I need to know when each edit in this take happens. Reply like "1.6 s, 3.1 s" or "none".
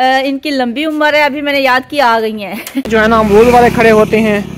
2.9 s